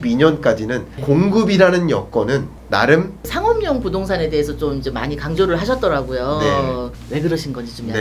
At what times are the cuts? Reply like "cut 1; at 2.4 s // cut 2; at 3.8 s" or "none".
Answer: cut 1; at 2.5 s // cut 2; at 3.2 s // cut 3; at 7.0 s